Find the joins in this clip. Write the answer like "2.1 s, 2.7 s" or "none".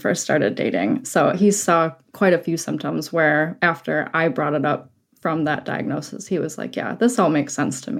none